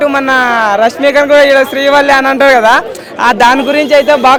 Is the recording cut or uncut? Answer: uncut